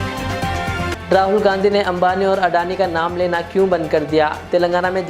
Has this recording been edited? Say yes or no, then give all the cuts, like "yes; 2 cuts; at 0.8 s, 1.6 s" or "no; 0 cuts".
yes; 1 cut; at 0.9 s